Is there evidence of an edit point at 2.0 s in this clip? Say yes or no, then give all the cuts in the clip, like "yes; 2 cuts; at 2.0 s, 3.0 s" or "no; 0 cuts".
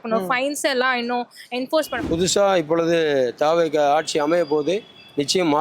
yes; 1 cut; at 2.0 s